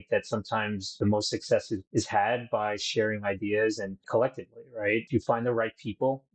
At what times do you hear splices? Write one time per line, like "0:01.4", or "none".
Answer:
0:01.0
0:05.1